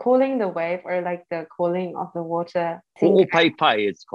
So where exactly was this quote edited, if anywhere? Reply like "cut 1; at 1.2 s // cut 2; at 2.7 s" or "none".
cut 1; at 2.8 s

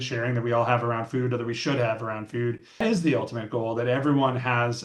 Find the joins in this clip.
cut 1; at 2.8 s

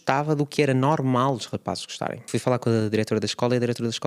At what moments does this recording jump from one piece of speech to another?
cut 1; at 2.3 s

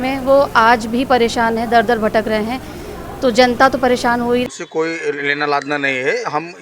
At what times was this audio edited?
cut 1; at 4.4 s

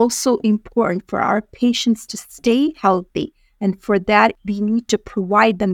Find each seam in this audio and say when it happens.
cut 1; at 4.4 s

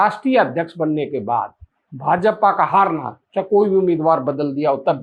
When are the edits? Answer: none

